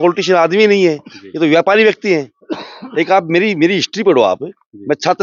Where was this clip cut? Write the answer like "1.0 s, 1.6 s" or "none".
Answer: none